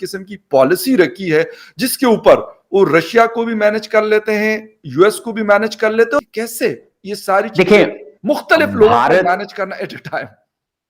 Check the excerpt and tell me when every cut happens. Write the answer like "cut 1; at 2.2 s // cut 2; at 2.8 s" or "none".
cut 1; at 6.3 s